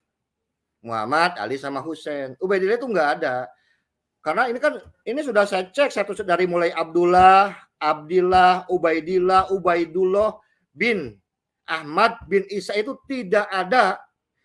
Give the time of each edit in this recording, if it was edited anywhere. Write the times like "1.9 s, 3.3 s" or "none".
none